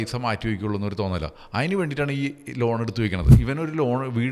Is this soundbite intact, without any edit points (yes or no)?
no